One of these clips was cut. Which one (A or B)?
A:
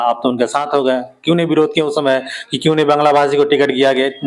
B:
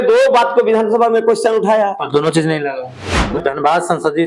B